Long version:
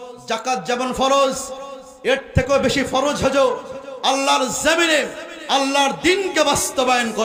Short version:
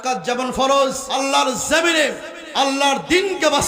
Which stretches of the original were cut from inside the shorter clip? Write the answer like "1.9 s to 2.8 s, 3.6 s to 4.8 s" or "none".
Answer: 1.5 s to 4.0 s